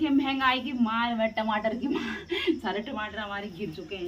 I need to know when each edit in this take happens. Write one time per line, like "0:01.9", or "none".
none